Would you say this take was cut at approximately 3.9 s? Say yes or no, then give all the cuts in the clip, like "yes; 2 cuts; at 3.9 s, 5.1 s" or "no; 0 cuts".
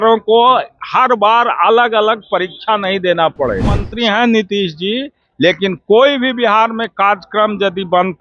yes; 1 cut; at 3.9 s